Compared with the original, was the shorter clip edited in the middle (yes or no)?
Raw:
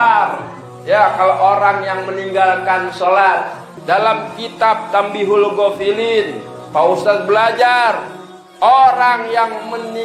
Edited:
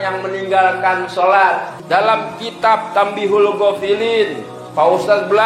yes